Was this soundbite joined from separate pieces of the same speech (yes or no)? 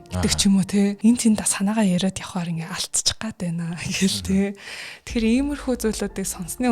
yes